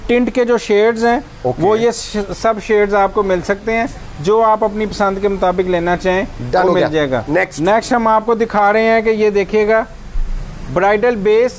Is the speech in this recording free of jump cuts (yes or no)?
yes